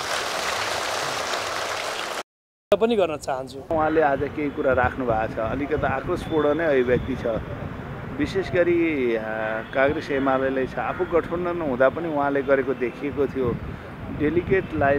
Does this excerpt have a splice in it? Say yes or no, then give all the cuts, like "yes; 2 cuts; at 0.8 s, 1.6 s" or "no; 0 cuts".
no; 0 cuts